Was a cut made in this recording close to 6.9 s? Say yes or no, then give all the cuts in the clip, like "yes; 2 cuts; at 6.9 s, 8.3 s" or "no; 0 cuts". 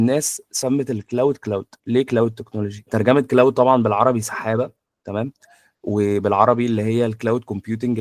no; 1 cut; at 2.8 s